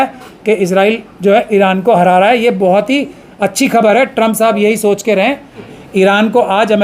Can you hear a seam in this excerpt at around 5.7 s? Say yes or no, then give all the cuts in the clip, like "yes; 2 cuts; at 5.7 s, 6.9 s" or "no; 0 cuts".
yes; 1 cut; at 5.7 s